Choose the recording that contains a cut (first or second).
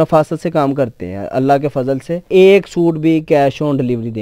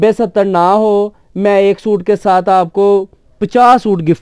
first